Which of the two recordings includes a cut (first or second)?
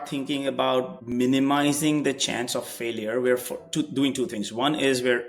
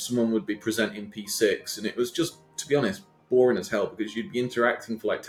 first